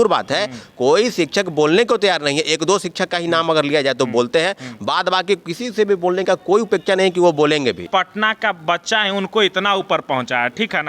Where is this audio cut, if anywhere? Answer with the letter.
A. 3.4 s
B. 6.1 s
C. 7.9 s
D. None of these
C